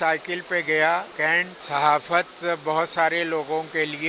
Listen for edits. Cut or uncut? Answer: cut